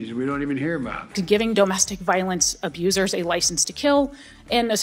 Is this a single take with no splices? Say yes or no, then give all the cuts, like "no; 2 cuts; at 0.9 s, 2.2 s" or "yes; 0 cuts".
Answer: no; 1 cut; at 1.0 s